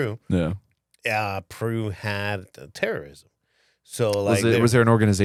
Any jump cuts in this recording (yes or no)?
no